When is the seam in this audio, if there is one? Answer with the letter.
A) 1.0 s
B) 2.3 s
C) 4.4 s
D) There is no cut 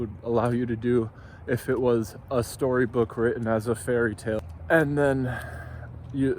C